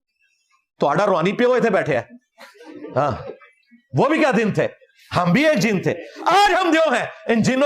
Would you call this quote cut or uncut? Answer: uncut